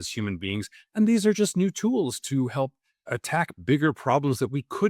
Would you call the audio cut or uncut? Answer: cut